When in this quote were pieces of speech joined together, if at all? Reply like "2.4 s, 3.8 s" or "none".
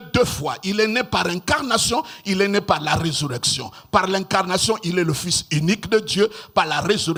none